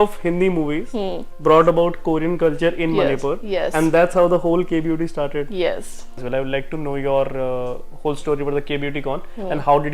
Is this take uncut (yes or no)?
no